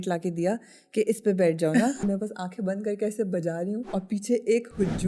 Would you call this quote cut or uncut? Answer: cut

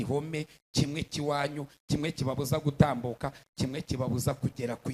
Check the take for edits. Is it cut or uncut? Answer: uncut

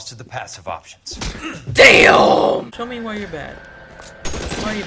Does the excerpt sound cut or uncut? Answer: cut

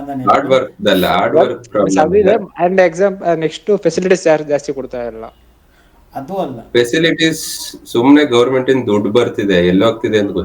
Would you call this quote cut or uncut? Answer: uncut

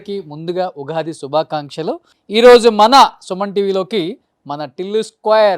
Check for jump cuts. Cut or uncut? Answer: cut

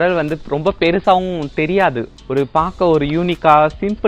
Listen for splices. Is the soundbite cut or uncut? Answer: cut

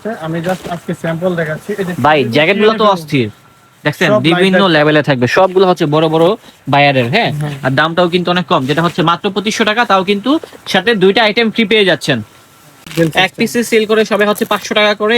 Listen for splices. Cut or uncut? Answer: cut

